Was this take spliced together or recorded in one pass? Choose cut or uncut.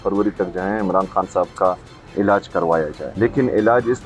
cut